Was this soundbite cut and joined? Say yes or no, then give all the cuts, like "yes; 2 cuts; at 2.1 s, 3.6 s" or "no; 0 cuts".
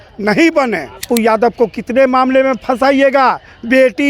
yes; 1 cut; at 1.0 s